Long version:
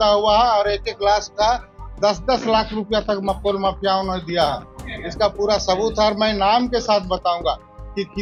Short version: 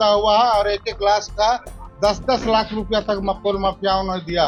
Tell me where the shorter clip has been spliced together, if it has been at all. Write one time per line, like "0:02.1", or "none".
none